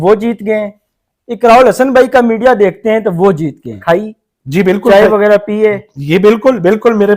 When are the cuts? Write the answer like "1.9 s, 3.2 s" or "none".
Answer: 3.7 s